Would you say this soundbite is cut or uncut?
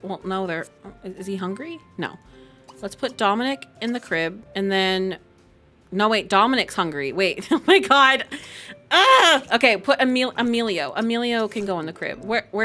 uncut